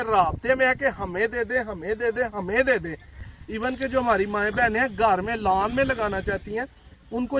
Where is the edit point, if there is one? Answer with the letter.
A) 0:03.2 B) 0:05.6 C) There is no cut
A